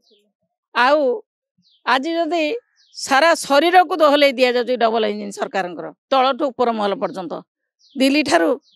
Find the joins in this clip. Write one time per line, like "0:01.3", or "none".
none